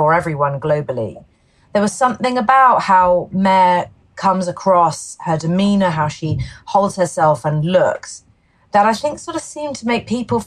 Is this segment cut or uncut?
uncut